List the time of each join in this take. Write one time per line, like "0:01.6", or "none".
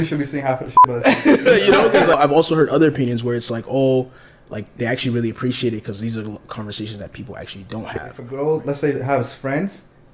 0:02.1
0:08.2